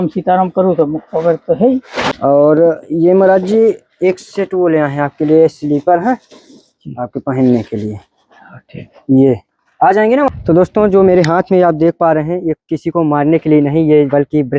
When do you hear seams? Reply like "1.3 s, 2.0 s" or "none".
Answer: 2.1 s, 10.3 s